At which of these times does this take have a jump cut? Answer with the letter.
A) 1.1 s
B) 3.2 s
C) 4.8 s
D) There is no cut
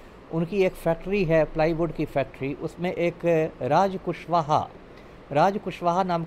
D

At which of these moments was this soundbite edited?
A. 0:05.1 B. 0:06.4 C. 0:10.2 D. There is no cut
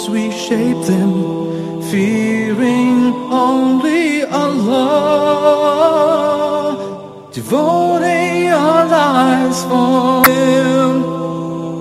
C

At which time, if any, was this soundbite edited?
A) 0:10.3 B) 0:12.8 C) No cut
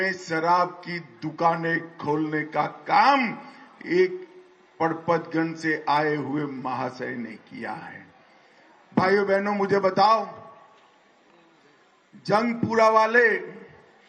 C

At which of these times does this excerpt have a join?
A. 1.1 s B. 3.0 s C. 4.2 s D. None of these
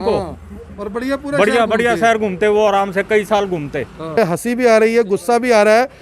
C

